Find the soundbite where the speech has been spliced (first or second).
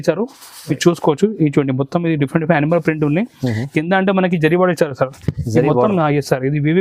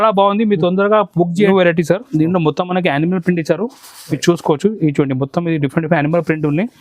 second